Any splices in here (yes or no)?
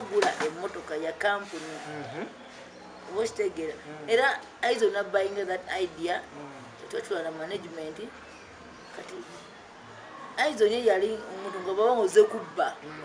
no